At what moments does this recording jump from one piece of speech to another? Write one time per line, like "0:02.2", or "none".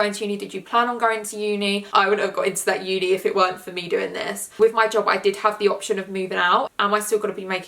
0:01.8
0:04.4
0:06.7